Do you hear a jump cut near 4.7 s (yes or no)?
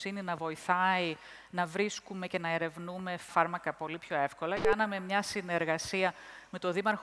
yes